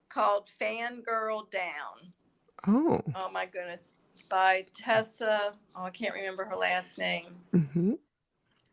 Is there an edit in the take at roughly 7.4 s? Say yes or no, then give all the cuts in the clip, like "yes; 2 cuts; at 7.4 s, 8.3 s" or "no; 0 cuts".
no; 0 cuts